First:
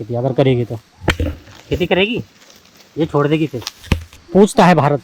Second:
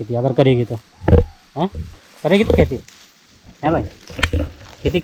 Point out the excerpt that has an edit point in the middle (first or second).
first